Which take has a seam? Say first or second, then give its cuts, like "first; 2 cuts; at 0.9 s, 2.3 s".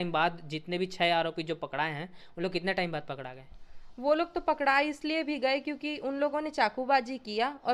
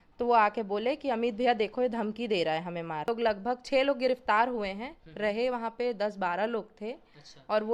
second; 1 cut; at 3.1 s